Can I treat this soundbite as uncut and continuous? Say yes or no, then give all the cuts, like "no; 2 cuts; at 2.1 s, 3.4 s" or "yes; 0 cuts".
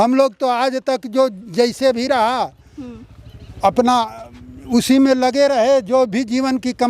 yes; 0 cuts